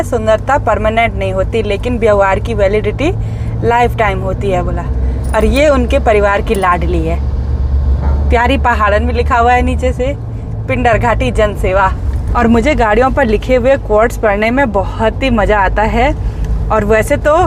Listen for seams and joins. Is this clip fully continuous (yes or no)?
yes